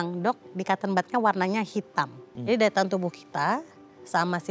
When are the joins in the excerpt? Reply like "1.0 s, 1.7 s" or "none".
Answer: 2.2 s